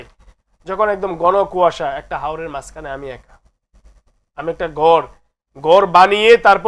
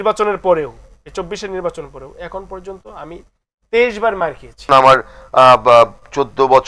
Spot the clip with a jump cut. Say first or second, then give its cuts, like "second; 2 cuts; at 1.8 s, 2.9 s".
second; 1 cut; at 4.7 s